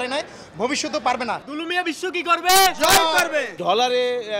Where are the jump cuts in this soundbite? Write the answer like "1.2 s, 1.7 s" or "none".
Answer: 1.5 s, 3.6 s